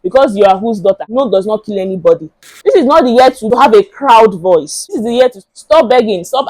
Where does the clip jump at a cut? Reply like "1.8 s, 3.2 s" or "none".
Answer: 1.1 s, 2.4 s, 3.4 s, 4.8 s